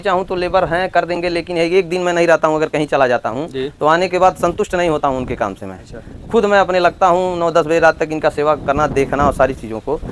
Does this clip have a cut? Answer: no; 0 cuts

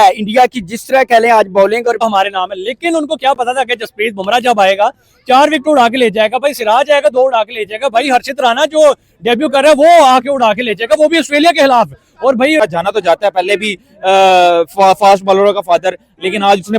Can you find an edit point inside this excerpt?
yes; 2 cuts; at 2.0 s, 12.6 s

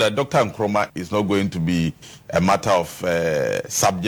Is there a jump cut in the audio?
no; 0 cuts

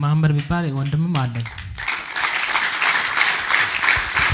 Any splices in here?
no; 0 cuts

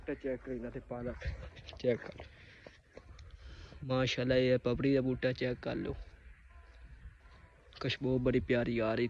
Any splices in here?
no; 0 cuts

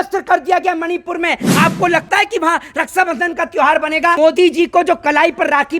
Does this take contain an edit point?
yes; 1 cut; at 4.2 s

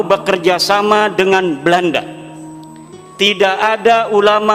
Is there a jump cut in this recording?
no; 0 cuts

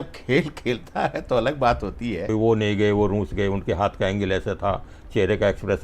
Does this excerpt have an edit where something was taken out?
yes; 1 cut; at 2.3 s

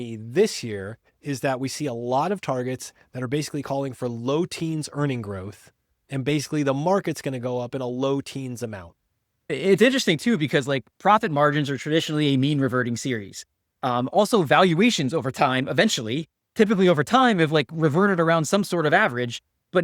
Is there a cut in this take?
yes; 1 cut; at 9.5 s

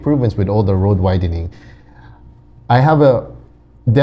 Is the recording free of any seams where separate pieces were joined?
yes; 0 cuts

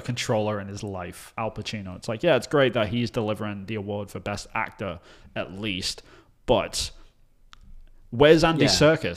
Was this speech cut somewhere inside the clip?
yes; 1 cut; at 1.2 s

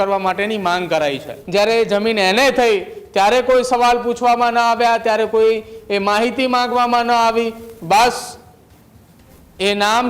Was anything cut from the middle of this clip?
yes; 1 cut; at 1.3 s

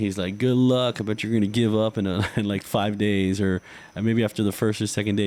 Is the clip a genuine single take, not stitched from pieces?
yes; 0 cuts

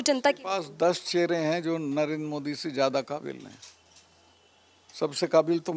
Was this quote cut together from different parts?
no; 0 cuts

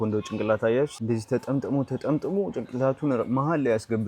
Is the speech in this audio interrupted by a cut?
yes; 1 cut; at 1.0 s

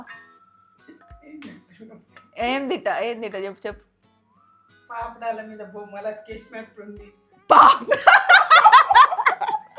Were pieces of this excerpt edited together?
no; 0 cuts

